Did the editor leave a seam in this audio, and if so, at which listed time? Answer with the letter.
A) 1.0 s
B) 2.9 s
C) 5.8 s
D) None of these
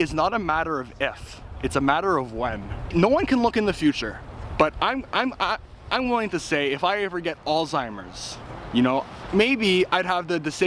B